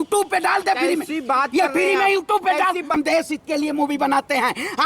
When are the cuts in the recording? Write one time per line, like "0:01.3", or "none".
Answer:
0:02.9